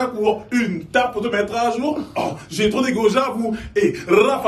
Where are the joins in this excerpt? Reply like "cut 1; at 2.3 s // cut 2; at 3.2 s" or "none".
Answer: none